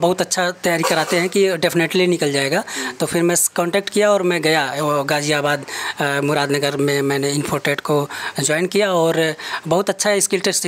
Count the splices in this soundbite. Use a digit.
0